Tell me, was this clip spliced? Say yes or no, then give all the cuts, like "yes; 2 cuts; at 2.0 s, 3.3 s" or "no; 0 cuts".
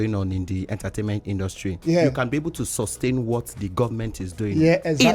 yes; 1 cut; at 1.8 s